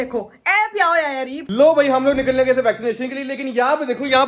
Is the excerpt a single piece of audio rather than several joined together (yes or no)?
no